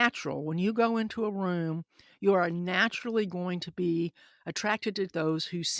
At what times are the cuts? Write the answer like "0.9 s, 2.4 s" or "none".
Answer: none